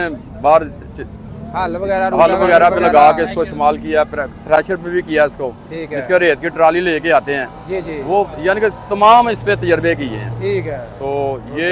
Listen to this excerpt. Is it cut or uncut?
uncut